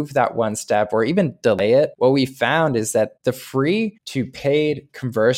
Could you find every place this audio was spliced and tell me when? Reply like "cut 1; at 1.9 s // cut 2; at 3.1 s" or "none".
cut 1; at 1.9 s // cut 2; at 3.2 s // cut 3; at 4.0 s